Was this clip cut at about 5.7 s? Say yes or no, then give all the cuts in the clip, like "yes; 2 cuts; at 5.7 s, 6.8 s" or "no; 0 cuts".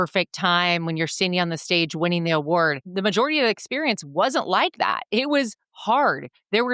no; 1 cut; at 2.9 s